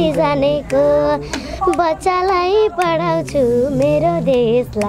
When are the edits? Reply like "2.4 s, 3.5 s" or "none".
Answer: none